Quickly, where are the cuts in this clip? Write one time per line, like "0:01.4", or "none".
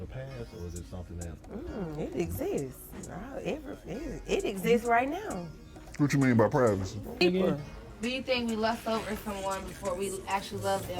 0:07.2